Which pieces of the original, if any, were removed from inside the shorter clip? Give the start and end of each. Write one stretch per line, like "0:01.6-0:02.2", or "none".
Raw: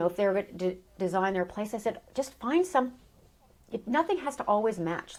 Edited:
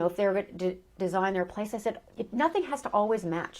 0:02.0-0:03.6